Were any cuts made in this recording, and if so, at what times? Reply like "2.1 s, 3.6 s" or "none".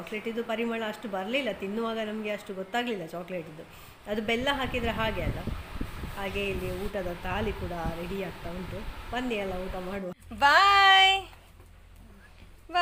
none